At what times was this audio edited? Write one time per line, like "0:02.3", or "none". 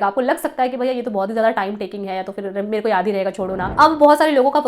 0:03.7